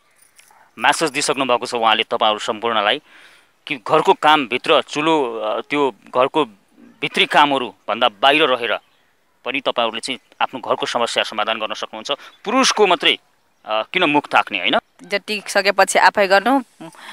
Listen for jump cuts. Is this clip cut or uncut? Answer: cut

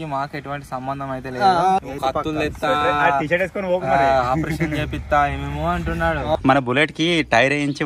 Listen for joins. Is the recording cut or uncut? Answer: cut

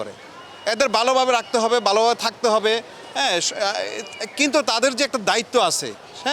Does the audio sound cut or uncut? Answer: uncut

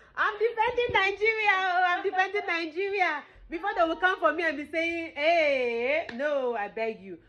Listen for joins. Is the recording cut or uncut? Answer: uncut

